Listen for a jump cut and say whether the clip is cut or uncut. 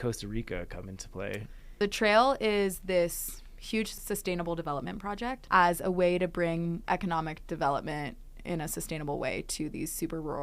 cut